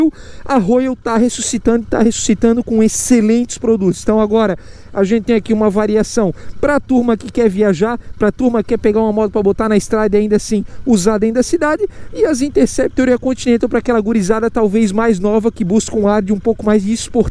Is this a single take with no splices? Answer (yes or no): yes